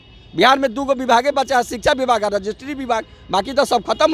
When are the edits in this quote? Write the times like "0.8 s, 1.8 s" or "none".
none

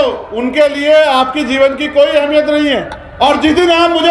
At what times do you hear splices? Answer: 3.0 s

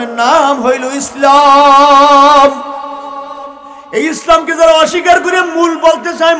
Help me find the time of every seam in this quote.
none

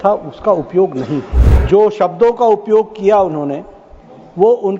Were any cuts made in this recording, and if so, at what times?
1.5 s

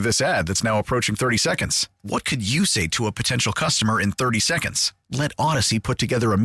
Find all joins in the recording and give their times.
none

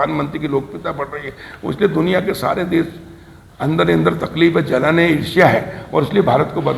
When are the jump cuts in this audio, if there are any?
none

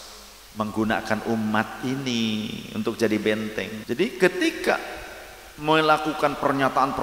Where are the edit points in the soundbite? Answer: 3.8 s

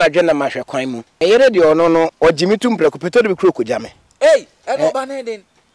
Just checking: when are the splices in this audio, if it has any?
1.0 s, 2.1 s

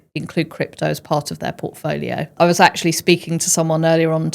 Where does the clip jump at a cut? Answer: 2.3 s

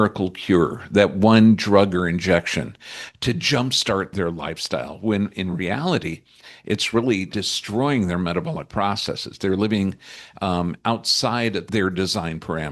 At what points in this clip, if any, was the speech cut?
4.1 s, 7.3 s, 11.6 s

